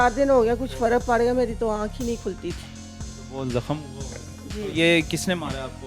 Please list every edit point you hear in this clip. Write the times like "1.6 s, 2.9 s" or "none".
none